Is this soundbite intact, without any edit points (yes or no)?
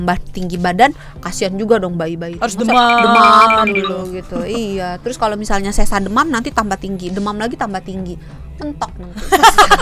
yes